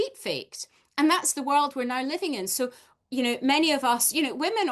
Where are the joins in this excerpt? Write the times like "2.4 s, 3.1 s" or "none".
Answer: none